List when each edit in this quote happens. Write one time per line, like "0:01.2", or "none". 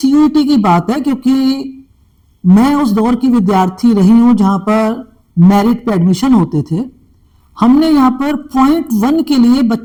none